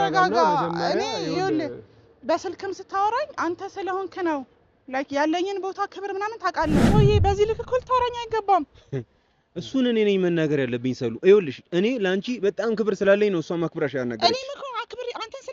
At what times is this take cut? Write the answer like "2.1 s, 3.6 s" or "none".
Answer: 6.8 s